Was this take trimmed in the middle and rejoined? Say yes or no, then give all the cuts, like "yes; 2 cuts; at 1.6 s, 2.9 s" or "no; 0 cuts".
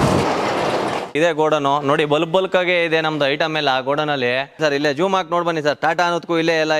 yes; 2 cuts; at 1.1 s, 4.6 s